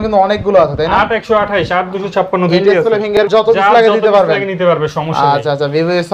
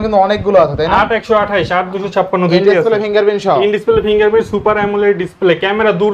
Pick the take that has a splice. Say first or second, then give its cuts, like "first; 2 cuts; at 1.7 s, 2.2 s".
first; 1 cut; at 3.2 s